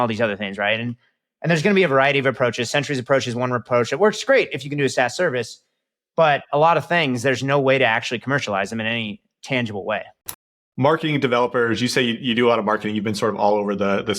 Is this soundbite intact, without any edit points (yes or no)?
no